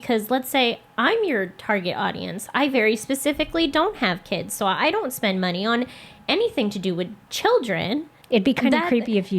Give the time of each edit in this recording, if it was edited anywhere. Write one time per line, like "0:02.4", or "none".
0:08.1